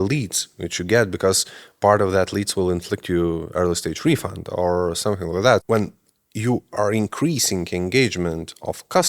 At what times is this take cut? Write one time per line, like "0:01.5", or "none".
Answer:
0:05.6